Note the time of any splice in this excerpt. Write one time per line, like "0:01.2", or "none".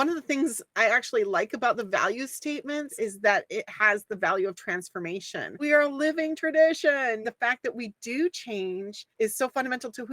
0:02.9
0:05.6
0:07.2
0:09.0